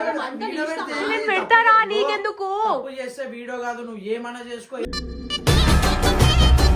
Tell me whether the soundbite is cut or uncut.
uncut